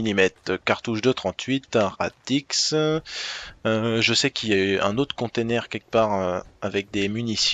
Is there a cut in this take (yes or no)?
yes